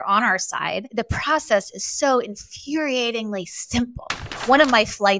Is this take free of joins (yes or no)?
no